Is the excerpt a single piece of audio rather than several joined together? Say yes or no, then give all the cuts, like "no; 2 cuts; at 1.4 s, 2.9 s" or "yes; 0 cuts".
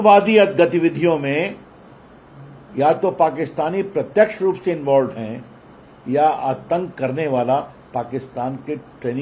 yes; 0 cuts